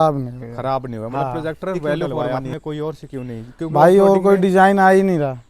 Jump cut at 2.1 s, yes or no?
yes